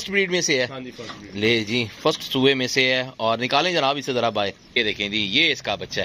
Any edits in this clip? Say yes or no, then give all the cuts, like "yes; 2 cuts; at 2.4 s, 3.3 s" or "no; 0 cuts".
yes; 1 cut; at 4.8 s